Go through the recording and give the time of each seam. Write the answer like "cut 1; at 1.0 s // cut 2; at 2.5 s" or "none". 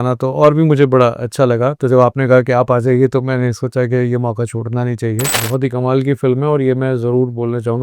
cut 1; at 5.4 s